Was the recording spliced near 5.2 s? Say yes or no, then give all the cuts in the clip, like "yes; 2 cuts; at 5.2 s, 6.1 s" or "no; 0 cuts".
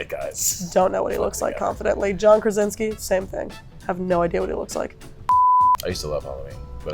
yes; 1 cut; at 5.2 s